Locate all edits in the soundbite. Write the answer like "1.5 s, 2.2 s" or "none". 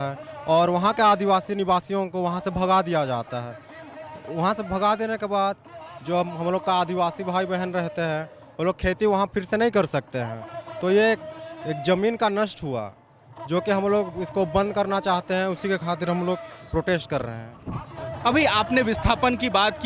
none